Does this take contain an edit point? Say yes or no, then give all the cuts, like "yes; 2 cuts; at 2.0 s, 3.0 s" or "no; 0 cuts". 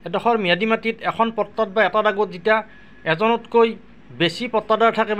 no; 0 cuts